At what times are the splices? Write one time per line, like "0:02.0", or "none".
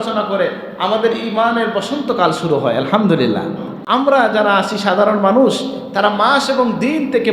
0:03.7